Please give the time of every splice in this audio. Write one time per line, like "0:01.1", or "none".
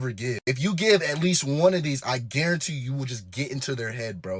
none

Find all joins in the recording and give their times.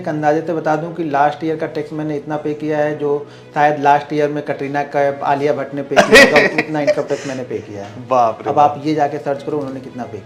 none

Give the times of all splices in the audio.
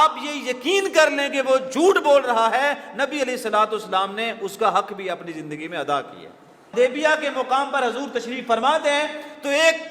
0:06.7

